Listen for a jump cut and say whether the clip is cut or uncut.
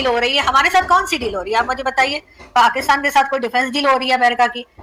uncut